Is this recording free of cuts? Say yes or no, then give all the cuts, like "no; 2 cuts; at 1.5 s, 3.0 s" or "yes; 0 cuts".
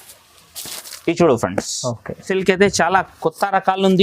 no; 1 cut; at 2.3 s